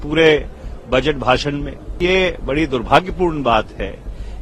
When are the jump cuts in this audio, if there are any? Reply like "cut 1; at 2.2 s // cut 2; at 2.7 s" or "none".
cut 1; at 2.0 s

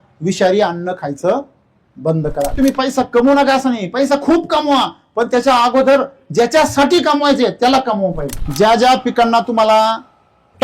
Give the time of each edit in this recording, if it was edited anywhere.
cut 1; at 2.5 s // cut 2; at 8.4 s

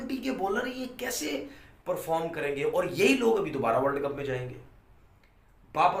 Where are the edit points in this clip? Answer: none

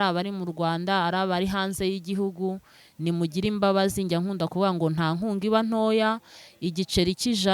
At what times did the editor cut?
none

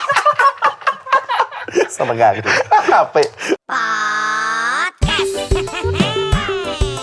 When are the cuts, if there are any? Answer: cut 1; at 3.6 s

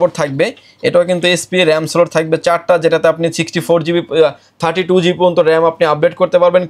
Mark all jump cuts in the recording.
none

